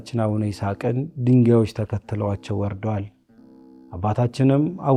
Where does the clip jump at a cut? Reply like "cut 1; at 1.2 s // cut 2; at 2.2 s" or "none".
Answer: none